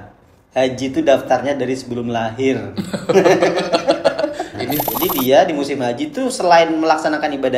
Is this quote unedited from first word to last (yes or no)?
no